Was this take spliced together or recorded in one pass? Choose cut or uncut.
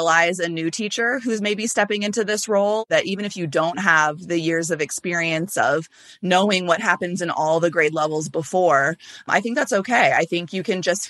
uncut